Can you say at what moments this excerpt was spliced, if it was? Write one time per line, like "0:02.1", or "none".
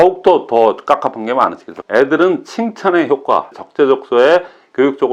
0:01.7
0:03.6